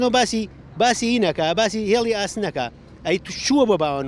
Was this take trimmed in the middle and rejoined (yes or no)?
no